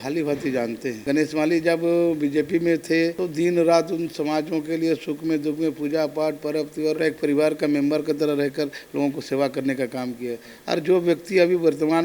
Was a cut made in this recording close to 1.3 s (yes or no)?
no